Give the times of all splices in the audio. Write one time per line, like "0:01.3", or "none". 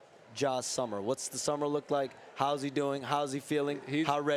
none

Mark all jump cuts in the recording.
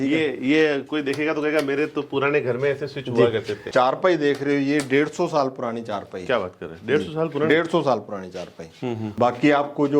0:03.6
0:09.1

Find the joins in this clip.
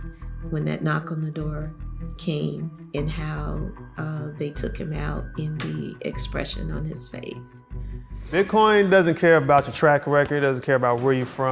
0:08.2

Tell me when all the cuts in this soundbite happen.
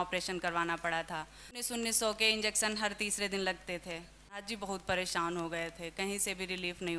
0:01.7
0:04.4

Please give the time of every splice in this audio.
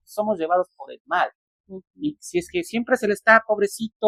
none

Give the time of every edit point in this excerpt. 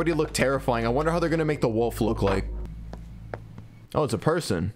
0:02.6
0:03.8

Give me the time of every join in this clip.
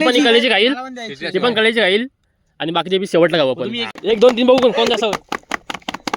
0:03.9

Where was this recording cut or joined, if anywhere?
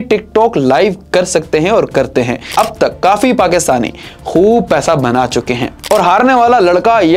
0:02.5
0:05.8

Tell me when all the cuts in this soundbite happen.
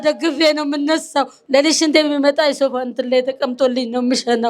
0:01.4

